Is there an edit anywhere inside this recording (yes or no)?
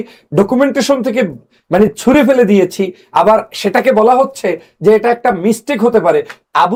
no